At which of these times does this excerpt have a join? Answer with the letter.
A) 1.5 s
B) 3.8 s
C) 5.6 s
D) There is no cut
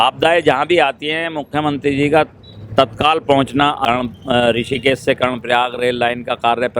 B